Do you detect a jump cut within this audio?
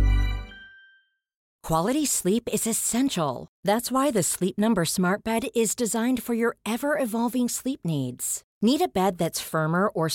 yes; 1 cut; at 1.5 s

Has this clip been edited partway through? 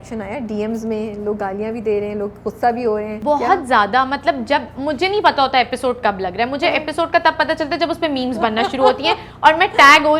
yes; 1 cut; at 3.1 s

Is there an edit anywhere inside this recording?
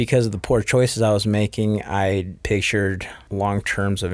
yes; 2 cuts; at 2.4 s, 3.1 s

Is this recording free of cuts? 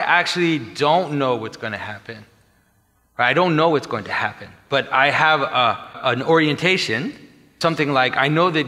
no; 2 cuts; at 6.0 s, 7.6 s

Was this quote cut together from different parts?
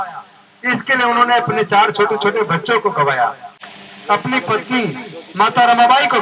no; 0 cuts

